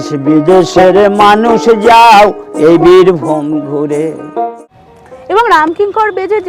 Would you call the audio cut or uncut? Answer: cut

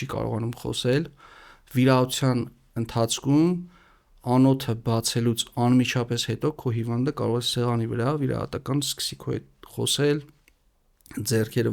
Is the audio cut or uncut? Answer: uncut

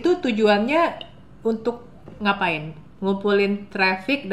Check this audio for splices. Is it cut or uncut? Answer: uncut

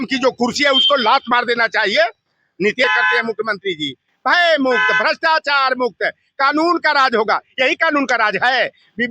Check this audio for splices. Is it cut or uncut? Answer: cut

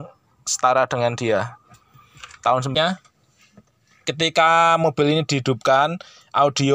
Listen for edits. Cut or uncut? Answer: cut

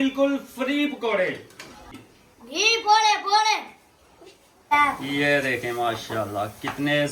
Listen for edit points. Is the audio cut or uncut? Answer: uncut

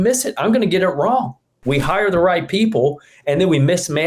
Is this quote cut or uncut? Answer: cut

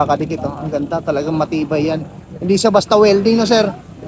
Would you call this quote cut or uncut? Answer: uncut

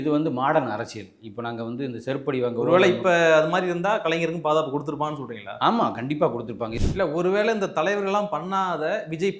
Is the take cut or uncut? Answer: cut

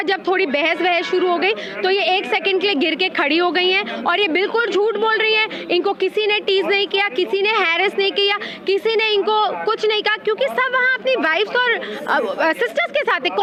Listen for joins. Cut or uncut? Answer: uncut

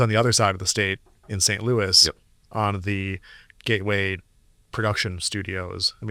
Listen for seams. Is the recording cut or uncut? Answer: uncut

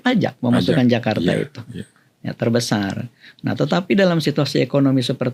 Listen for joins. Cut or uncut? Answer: uncut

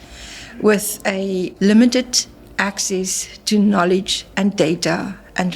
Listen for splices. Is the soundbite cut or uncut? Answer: cut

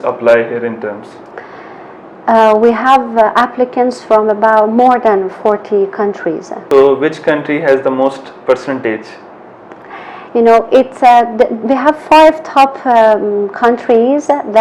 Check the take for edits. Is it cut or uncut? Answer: uncut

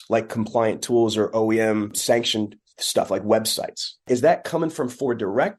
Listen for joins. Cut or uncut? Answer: cut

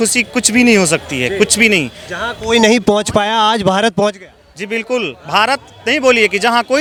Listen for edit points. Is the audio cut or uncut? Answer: uncut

